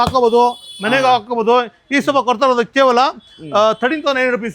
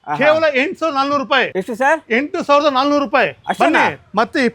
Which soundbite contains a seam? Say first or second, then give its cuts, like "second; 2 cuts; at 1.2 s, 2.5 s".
second; 1 cut; at 1.5 s